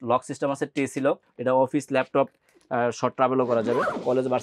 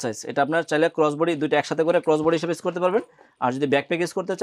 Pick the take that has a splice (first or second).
first